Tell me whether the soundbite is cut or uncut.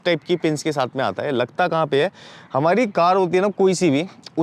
uncut